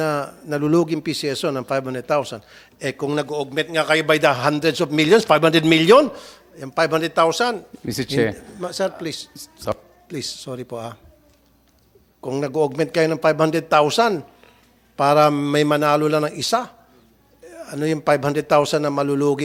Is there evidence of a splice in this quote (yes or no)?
no